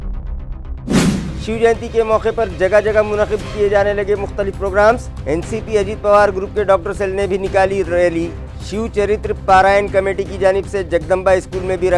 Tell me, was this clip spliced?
yes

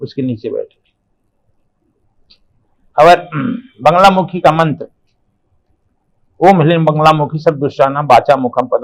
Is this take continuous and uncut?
yes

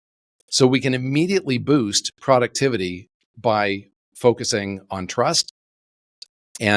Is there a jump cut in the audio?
no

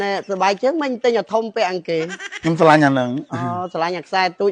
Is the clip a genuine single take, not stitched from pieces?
yes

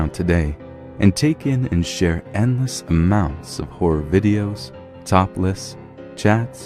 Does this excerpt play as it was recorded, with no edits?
no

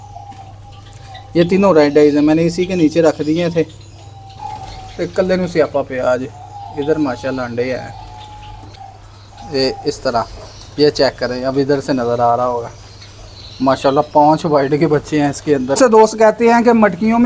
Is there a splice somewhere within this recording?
yes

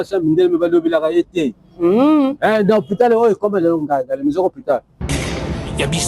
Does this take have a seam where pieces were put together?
yes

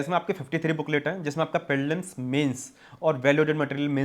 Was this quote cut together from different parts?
no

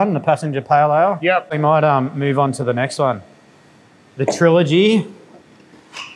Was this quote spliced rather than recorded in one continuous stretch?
yes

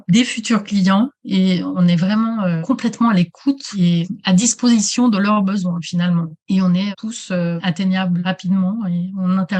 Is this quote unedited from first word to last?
no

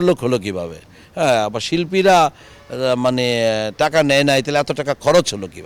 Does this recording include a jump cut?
no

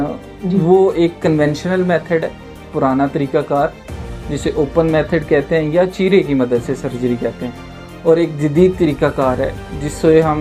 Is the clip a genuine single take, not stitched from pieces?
yes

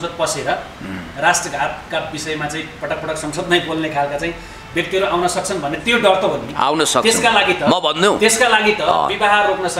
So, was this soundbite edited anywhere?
no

